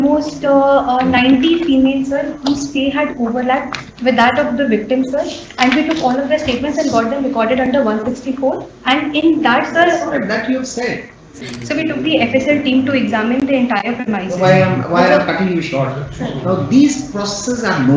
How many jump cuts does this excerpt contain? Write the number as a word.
one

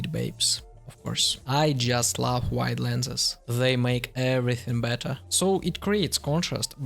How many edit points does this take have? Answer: two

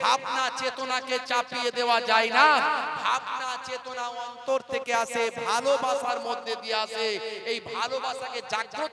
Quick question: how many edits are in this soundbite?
zero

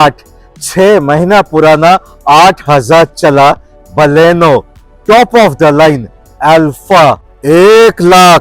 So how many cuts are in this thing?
one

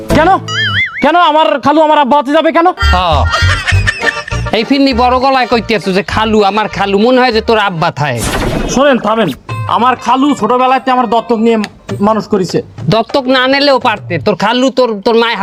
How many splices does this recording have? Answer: zero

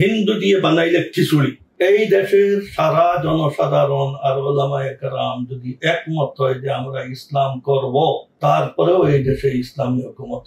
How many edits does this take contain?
one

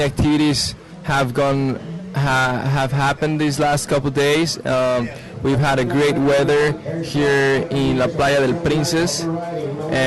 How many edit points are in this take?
zero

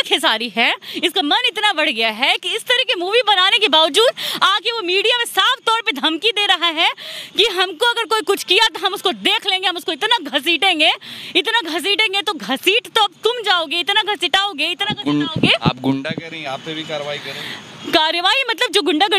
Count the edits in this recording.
zero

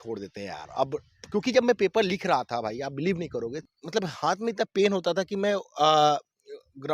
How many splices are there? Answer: one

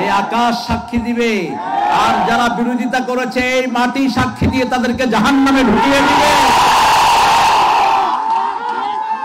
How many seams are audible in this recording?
zero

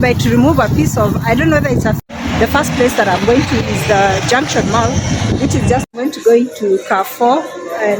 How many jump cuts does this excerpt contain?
two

